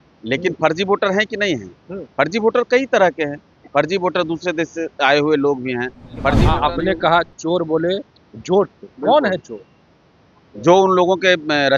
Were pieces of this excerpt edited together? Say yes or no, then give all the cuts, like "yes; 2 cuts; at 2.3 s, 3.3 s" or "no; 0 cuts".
yes; 1 cut; at 6.4 s